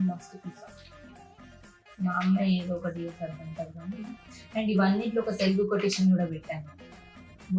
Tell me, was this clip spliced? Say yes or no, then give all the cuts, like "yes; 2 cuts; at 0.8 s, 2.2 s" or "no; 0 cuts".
no; 0 cuts